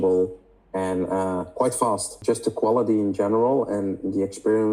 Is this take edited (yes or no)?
yes